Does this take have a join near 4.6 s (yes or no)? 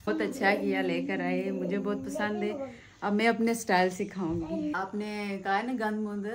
yes